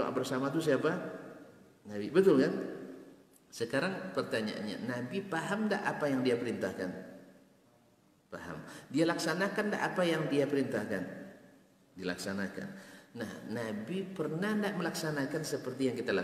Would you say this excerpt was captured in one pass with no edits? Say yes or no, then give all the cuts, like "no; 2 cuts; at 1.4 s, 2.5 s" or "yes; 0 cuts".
yes; 0 cuts